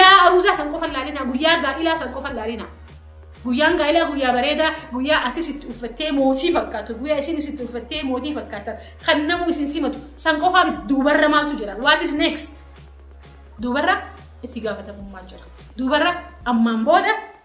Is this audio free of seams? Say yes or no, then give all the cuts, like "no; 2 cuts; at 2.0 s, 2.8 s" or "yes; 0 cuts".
yes; 0 cuts